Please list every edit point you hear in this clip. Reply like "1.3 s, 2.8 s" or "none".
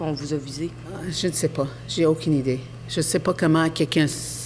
0.9 s